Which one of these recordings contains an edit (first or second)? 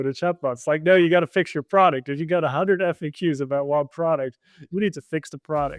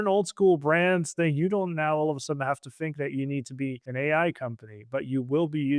second